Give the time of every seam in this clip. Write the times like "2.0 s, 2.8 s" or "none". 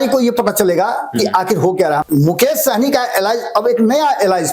2.0 s